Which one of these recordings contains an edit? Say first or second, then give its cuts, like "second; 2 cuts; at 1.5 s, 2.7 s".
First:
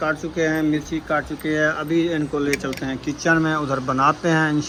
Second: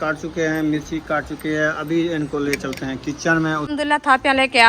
second; 1 cut; at 3.6 s